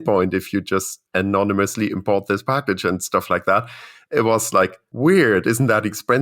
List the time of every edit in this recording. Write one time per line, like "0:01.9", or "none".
0:01.0
0:04.8